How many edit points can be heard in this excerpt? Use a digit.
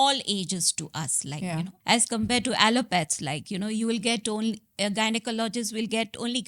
1